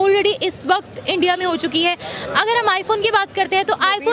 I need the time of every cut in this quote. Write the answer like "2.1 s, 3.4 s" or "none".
none